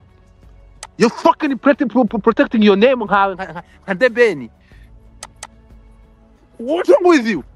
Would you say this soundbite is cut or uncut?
uncut